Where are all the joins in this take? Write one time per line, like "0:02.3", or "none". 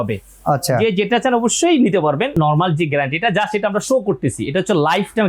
0:02.4